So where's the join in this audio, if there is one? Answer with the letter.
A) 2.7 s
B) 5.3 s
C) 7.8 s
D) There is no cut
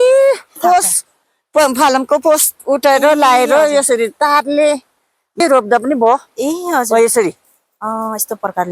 B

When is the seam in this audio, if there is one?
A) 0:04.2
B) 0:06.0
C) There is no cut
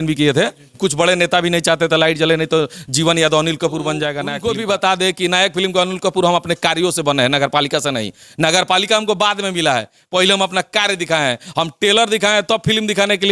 A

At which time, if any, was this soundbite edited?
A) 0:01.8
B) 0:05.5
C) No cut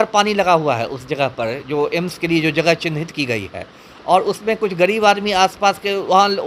C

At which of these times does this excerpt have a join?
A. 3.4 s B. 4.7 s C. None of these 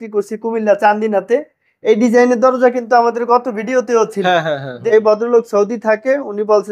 B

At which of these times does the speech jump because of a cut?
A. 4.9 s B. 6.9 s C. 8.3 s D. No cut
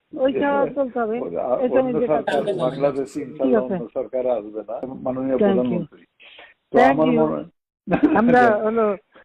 A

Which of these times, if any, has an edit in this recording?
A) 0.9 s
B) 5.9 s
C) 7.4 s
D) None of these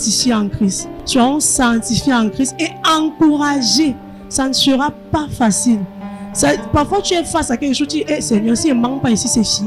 A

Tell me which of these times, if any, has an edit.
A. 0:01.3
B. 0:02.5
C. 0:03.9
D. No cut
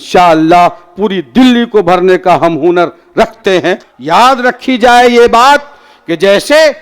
C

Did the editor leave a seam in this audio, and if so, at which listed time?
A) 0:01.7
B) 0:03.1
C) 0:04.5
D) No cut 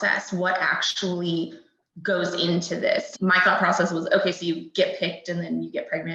B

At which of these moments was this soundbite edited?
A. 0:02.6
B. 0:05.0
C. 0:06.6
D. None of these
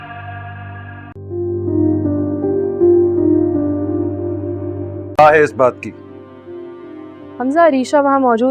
B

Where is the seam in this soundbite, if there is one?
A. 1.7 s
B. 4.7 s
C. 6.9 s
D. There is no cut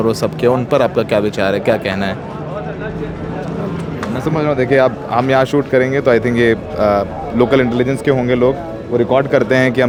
D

